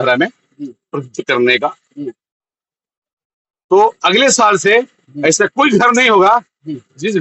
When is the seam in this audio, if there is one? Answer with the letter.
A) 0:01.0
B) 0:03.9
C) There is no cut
C